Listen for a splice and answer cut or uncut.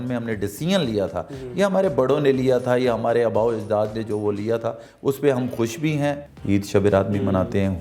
cut